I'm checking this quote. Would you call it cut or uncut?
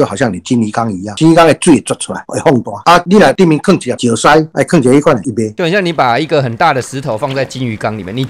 cut